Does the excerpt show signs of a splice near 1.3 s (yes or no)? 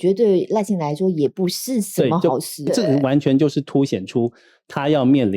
no